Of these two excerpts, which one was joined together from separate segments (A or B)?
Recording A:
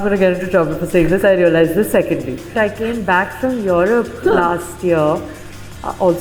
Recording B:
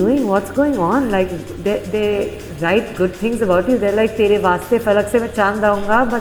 A